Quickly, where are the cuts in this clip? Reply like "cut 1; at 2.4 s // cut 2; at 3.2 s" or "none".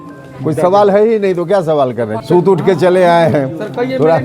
cut 1; at 2.1 s